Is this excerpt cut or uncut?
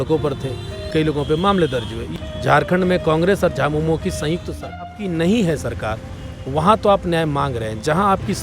cut